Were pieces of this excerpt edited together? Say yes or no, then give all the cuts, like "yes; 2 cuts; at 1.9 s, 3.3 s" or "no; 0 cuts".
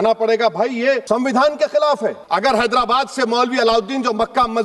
yes; 2 cuts; at 1.0 s, 2.2 s